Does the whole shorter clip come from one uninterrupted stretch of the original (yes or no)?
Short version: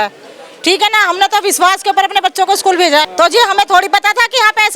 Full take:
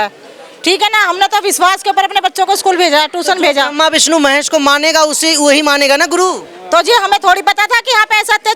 no